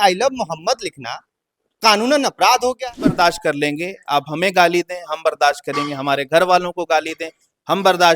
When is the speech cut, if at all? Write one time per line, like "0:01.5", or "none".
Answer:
0:03.1